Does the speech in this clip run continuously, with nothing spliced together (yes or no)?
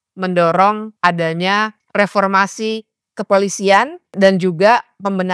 no